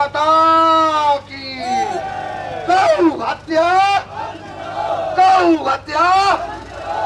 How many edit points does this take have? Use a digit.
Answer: 0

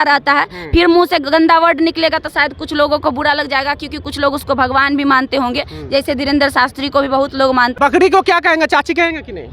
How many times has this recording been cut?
1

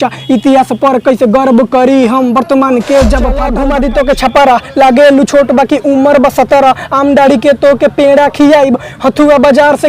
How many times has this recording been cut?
1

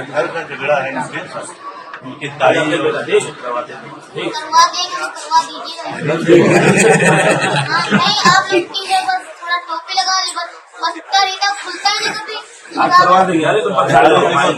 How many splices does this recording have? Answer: 0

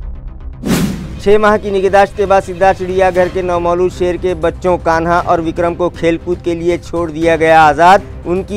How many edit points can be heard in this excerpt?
1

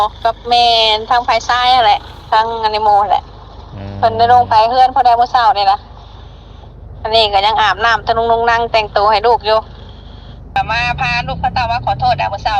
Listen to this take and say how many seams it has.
1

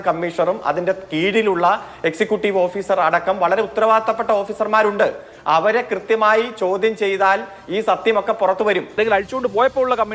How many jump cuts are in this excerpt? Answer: 1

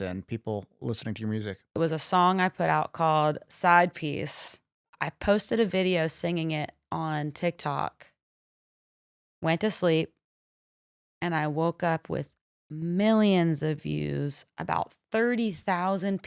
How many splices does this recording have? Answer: 2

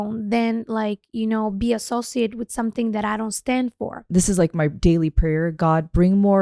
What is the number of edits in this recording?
1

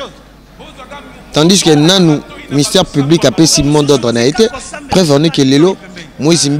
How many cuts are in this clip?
1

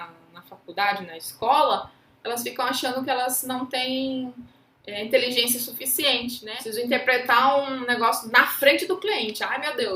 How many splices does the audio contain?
1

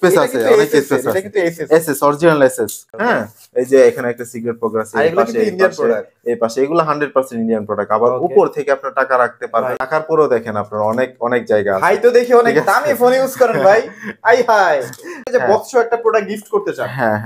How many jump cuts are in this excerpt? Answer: 3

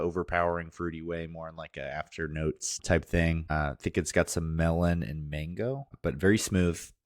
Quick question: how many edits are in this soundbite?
3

